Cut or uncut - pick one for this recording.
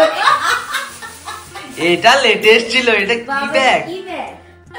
uncut